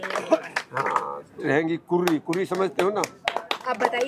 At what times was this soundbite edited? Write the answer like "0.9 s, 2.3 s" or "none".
1.4 s